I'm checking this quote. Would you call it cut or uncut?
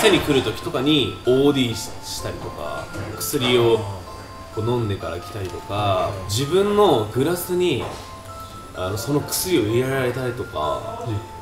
cut